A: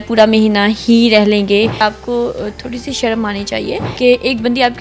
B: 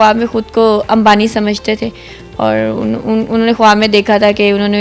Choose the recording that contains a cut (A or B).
A